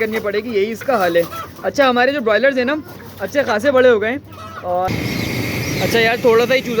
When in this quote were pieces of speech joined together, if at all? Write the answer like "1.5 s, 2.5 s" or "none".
4.9 s